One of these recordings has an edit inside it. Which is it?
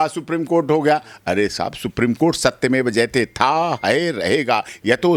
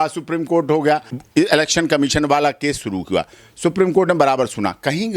second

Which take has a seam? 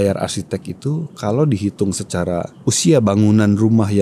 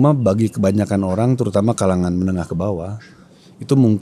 first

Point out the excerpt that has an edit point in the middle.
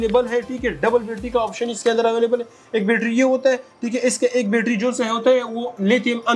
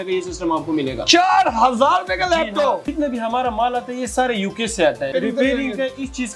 second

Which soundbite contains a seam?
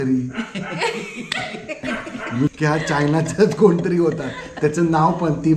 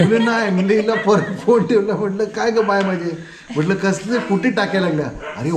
first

